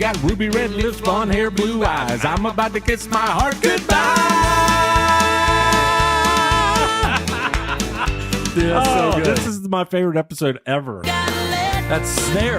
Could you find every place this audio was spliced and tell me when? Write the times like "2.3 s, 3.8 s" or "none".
11.1 s